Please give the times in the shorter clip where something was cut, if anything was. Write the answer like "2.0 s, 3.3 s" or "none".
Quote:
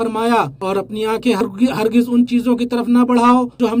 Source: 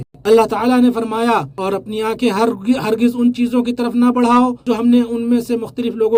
1.4 s